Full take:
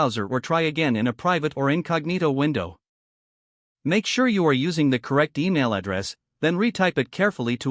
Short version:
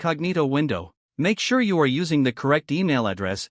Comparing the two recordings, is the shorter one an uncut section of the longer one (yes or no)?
no